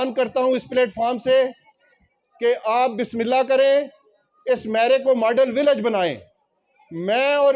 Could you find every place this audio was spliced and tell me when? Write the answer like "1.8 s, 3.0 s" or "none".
none